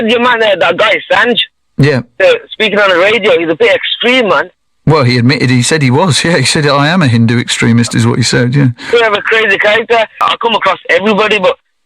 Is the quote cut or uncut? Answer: cut